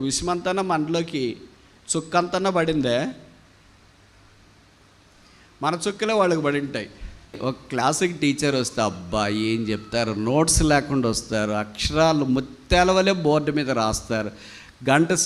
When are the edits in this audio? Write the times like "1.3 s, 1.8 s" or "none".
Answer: 7.4 s